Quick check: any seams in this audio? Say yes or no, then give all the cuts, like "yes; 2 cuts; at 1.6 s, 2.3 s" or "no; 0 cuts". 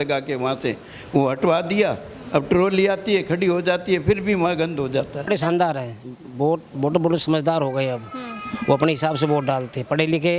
yes; 1 cut; at 5.3 s